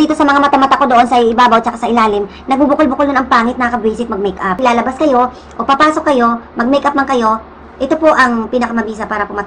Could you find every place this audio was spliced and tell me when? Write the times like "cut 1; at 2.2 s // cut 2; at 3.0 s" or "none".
cut 1; at 4.6 s